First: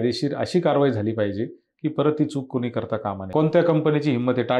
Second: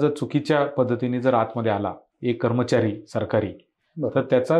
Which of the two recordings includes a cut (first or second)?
first